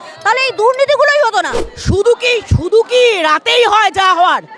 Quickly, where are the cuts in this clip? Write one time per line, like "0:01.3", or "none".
0:01.6